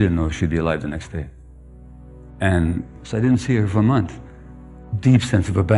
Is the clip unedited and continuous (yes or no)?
yes